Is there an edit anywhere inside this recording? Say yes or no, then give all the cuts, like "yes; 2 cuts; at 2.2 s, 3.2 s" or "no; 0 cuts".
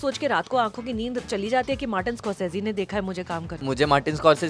yes; 1 cut; at 3.6 s